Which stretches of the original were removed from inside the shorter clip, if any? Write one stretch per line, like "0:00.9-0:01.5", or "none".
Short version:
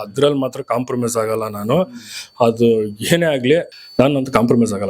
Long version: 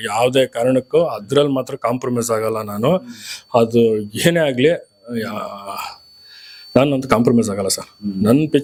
0:04.9-0:06.6